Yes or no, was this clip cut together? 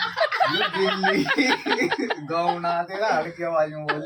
no